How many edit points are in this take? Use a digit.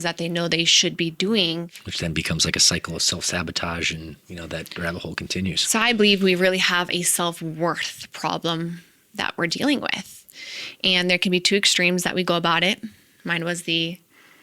1